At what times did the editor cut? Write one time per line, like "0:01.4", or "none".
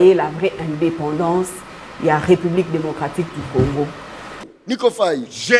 0:04.4